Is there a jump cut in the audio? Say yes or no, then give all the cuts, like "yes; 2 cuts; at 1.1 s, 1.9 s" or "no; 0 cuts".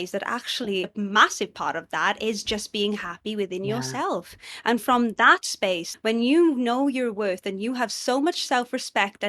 yes; 2 cuts; at 0.9 s, 5.9 s